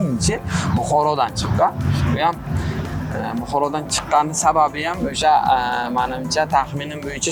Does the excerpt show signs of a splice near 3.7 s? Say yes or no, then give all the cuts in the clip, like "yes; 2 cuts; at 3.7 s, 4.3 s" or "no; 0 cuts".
no; 0 cuts